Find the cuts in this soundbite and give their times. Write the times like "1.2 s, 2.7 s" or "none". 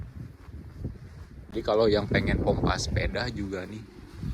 1.5 s